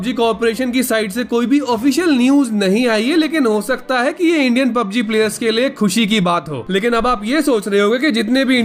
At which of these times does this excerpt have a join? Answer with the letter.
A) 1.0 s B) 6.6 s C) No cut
B